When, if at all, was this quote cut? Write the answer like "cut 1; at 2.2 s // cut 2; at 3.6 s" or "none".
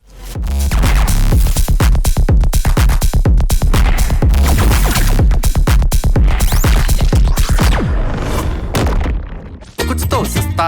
cut 1; at 9.6 s

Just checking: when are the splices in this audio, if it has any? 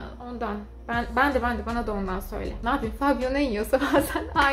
cut 1; at 2.5 s

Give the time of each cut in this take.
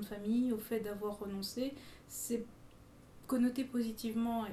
none

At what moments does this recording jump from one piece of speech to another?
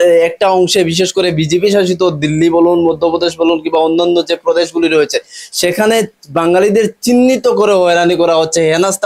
none

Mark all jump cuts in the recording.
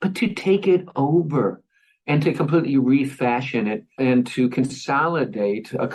none

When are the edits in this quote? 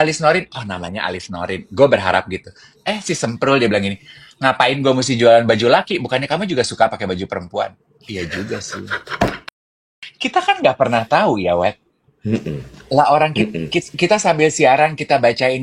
cut 1; at 10.0 s

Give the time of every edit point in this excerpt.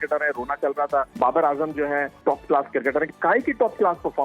cut 1; at 1.1 s // cut 2; at 2.2 s

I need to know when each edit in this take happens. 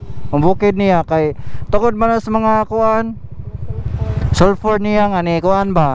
none

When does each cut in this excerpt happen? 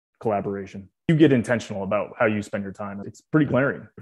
cut 1; at 1.1 s

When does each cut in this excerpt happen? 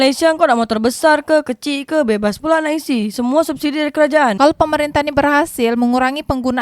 cut 1; at 4.3 s

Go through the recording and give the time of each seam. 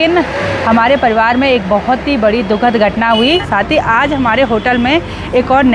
cut 1; at 3.4 s

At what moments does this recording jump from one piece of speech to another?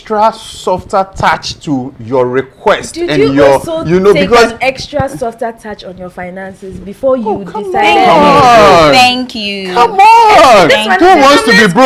none

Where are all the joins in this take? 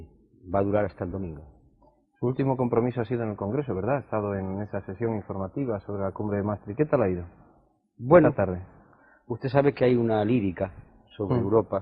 none

